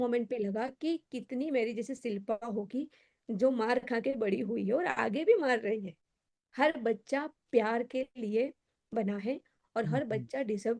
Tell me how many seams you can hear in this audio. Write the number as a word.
zero